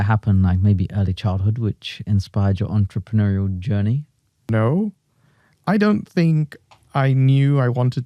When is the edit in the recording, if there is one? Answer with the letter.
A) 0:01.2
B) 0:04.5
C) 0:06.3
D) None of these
B